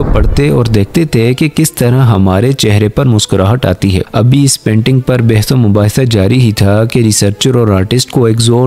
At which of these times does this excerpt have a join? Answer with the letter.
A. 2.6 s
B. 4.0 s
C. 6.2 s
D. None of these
B